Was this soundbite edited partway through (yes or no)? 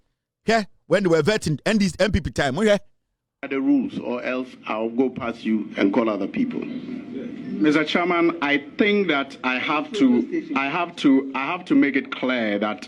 no